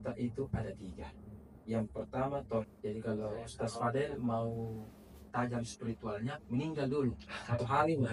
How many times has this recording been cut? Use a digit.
1